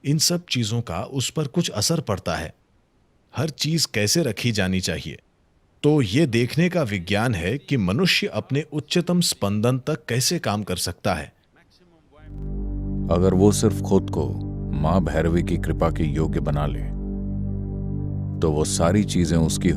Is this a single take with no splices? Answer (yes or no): no